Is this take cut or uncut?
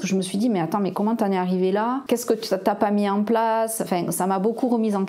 cut